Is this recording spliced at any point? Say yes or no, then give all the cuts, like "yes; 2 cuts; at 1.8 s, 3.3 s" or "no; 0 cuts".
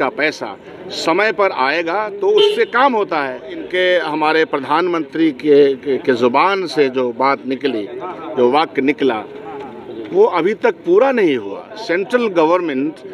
yes; 2 cuts; at 3.6 s, 11.7 s